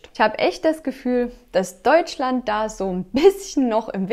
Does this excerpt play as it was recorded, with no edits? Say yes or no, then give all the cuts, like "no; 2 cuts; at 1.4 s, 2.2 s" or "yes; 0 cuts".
yes; 0 cuts